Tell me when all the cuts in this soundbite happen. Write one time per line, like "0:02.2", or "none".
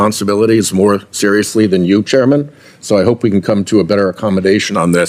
none